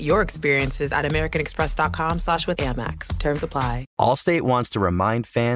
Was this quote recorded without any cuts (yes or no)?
no